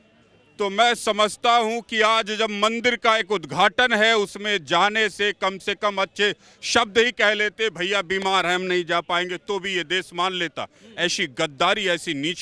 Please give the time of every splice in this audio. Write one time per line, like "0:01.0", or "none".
none